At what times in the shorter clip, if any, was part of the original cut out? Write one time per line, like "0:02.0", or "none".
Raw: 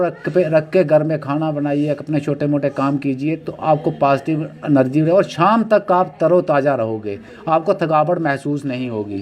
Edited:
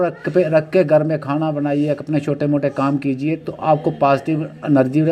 none